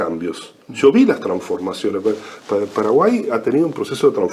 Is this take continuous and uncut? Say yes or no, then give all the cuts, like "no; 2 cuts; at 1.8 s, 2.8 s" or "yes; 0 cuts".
yes; 0 cuts